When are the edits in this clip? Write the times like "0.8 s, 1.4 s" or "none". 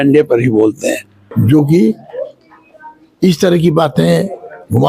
1.1 s